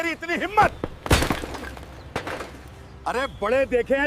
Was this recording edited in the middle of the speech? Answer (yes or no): yes